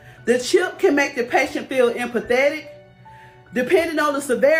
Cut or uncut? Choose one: uncut